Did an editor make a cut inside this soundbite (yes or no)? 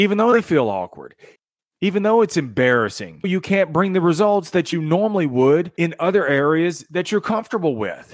yes